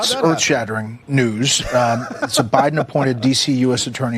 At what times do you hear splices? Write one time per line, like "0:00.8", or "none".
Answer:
0:00.9